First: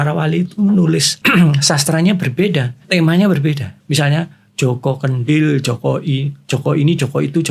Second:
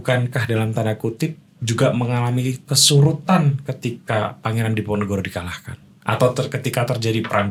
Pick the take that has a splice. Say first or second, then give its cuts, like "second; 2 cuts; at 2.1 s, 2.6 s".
first; 3 cuts; at 1.1 s, 2.8 s, 3.7 s